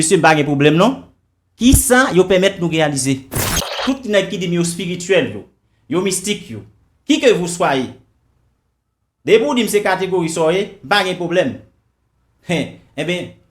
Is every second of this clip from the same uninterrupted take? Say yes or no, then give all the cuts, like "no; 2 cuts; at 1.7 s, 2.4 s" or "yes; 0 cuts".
no; 1 cut; at 3.8 s